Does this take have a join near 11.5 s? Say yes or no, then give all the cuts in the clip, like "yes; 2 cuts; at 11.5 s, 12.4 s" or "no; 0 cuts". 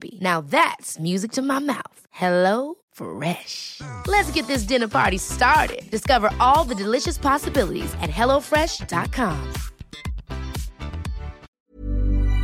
yes; 1 cut; at 11.5 s